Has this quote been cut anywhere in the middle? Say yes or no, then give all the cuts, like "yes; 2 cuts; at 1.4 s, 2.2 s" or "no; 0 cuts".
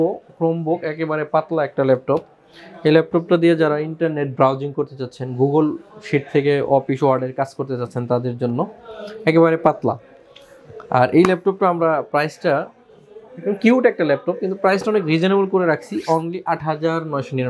no; 0 cuts